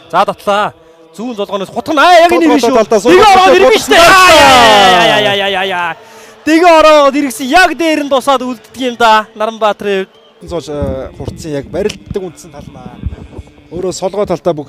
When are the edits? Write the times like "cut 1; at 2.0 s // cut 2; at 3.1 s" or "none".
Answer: cut 1; at 10.5 s